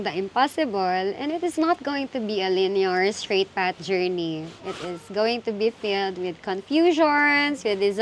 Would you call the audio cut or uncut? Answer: uncut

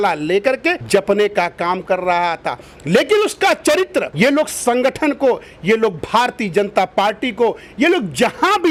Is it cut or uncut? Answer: uncut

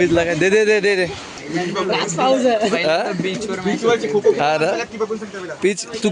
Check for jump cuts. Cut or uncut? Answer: cut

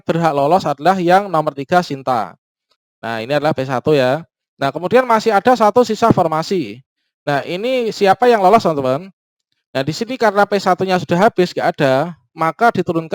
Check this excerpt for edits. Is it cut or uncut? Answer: uncut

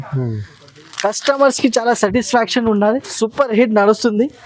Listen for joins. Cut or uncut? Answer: cut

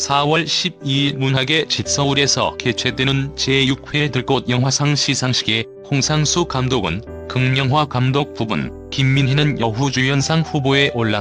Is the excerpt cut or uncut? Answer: uncut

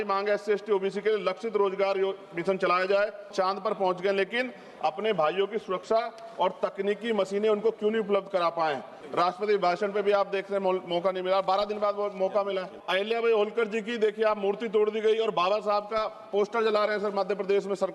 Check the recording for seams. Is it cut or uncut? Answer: cut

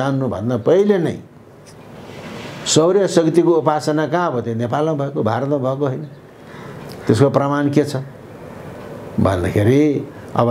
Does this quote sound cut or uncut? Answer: uncut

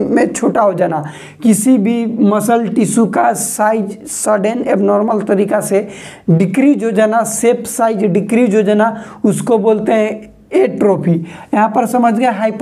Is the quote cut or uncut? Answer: uncut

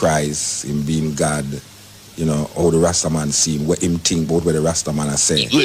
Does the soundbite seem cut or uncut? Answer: uncut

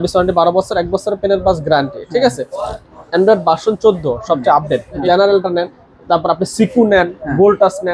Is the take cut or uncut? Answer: cut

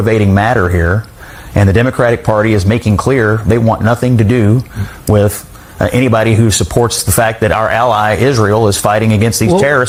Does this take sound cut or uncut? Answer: uncut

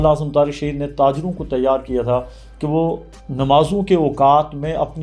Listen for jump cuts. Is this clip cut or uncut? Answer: uncut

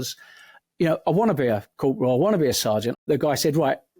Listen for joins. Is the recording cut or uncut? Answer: cut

